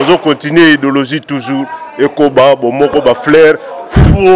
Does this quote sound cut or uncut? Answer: uncut